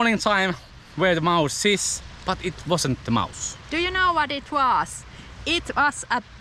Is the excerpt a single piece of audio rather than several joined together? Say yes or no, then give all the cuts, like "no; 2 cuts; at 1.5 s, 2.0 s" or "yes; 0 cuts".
yes; 0 cuts